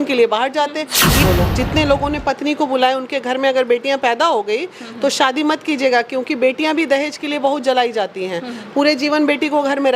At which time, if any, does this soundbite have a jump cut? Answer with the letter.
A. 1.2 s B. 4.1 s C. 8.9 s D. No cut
A